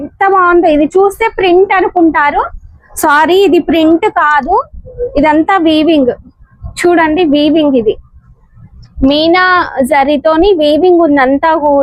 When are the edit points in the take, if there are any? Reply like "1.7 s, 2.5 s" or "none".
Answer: none

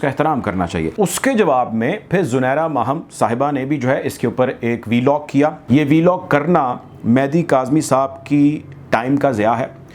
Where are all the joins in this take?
0.9 s, 5.6 s

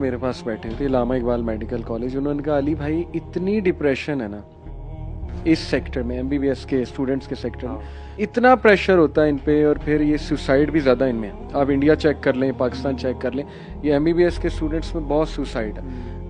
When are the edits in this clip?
none

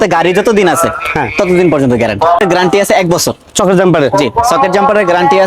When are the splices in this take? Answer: 2.4 s

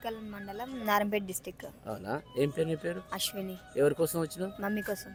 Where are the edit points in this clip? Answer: none

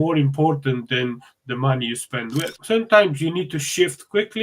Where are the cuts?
2.6 s

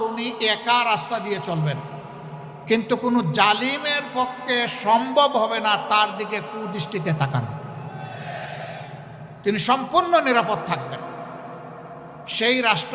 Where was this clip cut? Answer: none

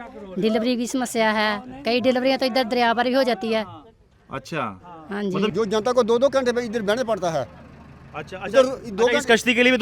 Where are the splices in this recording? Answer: 5.5 s

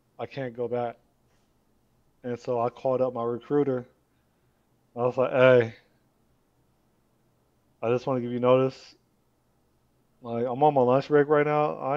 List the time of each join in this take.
none

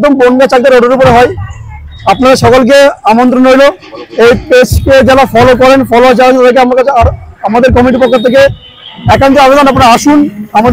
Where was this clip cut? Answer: none

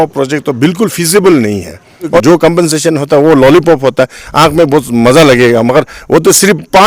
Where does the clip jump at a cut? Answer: 2.2 s

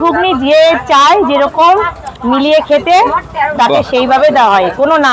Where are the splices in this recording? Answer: none

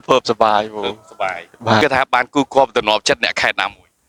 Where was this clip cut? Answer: none

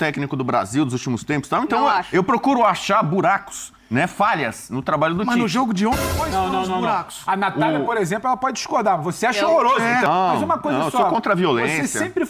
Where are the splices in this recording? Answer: 10.1 s

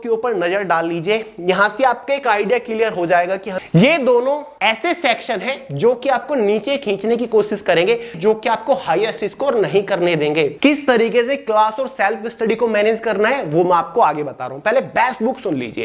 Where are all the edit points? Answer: 3.5 s, 4.5 s, 8.1 s, 10.5 s

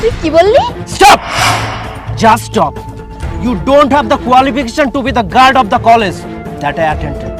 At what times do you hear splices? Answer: none

